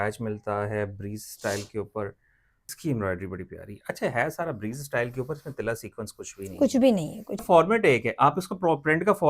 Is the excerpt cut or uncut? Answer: cut